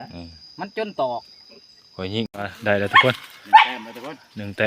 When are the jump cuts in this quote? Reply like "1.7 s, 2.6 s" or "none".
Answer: 2.3 s